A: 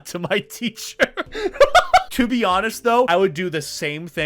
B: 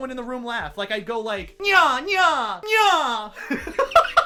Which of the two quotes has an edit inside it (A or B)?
A